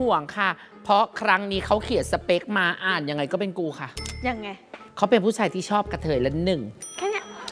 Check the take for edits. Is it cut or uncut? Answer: cut